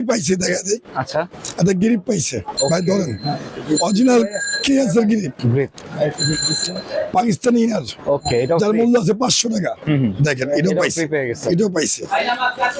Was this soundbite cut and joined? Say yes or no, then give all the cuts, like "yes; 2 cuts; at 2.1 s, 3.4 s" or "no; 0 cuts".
no; 0 cuts